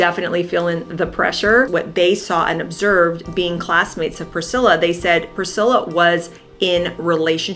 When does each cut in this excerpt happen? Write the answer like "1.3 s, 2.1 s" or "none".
1.7 s